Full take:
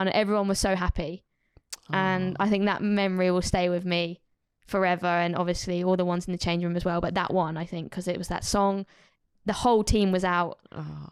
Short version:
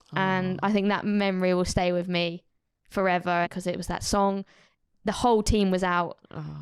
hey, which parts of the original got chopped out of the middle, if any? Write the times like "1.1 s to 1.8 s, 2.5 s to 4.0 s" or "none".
5.2 s to 7.9 s